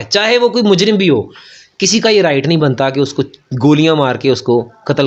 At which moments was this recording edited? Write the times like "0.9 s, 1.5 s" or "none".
none